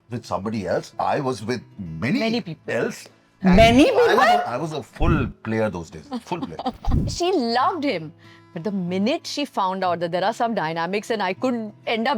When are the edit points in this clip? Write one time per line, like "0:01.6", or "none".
0:06.9